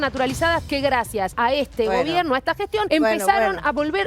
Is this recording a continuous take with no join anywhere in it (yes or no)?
no